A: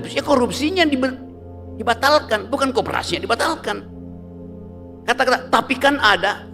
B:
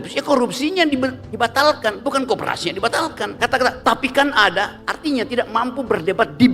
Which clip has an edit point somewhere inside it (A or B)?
B